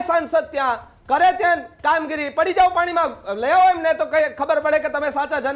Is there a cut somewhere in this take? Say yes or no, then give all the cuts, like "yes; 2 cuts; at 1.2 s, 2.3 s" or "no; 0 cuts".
no; 0 cuts